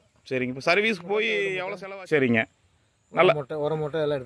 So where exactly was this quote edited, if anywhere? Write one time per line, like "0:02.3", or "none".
0:01.7